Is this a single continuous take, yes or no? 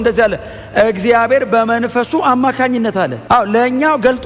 no